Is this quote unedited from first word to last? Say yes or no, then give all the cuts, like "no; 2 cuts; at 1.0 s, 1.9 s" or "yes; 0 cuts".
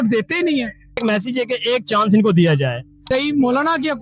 no; 2 cuts; at 1.0 s, 3.1 s